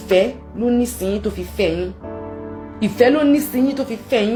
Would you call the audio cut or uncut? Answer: uncut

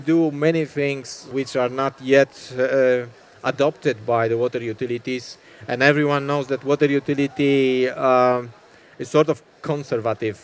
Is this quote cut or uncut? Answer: cut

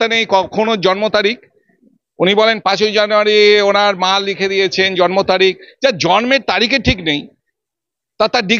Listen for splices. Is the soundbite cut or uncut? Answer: uncut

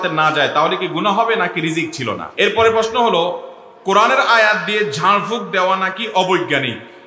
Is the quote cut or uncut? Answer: cut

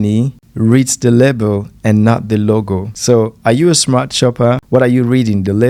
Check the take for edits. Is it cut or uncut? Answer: uncut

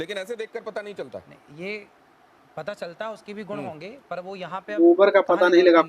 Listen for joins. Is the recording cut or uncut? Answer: cut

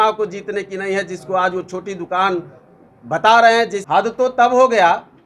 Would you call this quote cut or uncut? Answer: cut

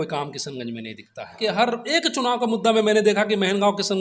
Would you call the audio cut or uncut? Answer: cut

